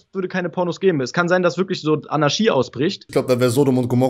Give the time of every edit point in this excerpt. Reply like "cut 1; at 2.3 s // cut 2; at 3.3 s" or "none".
cut 1; at 3.0 s